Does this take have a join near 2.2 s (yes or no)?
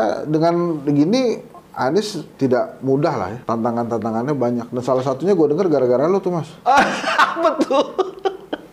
yes